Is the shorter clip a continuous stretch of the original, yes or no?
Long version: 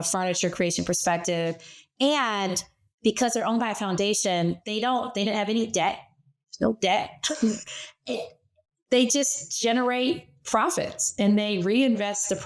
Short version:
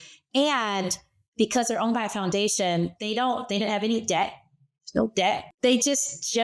no